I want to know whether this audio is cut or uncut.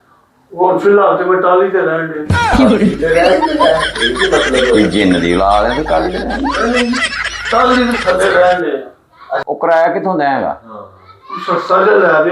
cut